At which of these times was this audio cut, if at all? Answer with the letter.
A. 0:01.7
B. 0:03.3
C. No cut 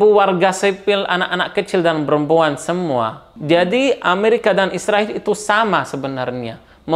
B